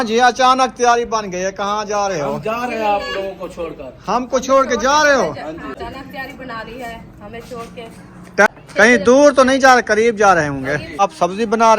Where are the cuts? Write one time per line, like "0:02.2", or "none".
0:05.8
0:08.5
0:11.0